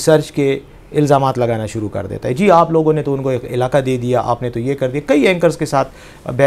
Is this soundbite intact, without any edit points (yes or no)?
yes